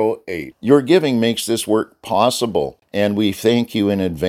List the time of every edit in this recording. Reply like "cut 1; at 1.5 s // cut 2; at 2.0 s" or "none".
cut 1; at 2.8 s